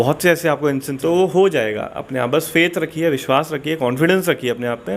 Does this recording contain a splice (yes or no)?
yes